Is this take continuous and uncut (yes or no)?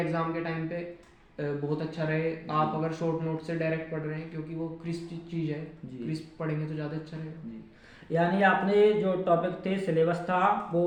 yes